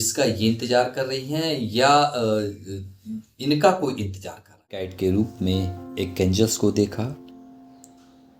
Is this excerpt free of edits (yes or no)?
no